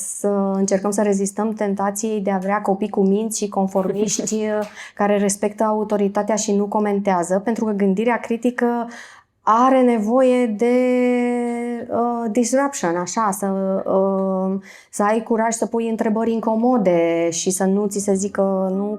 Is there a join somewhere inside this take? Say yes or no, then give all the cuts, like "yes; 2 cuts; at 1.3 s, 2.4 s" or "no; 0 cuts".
no; 0 cuts